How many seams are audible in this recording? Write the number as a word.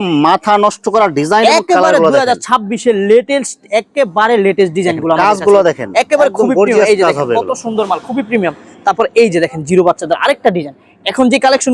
zero